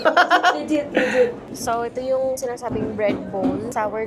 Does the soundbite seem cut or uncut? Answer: cut